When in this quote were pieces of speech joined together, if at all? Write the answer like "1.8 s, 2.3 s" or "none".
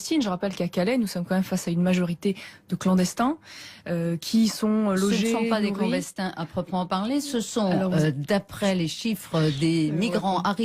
2.2 s